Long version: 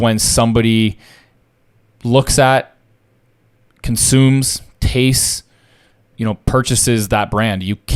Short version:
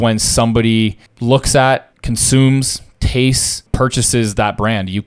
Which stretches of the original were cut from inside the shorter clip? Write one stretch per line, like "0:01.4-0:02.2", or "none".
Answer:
0:01.1-0:01.9
0:02.8-0:03.7
0:05.5-0:06.4